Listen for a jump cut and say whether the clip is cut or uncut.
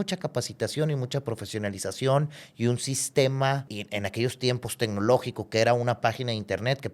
cut